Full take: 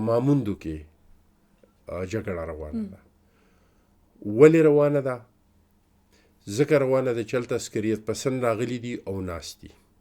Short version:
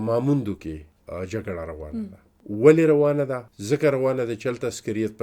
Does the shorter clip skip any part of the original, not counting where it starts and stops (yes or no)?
yes